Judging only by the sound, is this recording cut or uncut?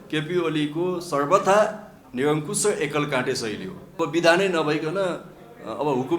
cut